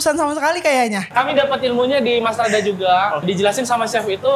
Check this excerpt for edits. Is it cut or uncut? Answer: cut